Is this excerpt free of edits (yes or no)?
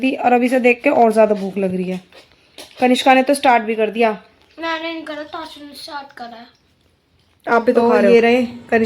no